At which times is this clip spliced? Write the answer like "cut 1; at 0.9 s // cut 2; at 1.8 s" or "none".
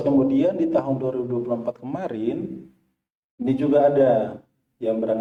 none